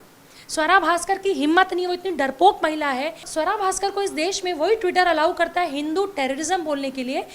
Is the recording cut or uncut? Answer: cut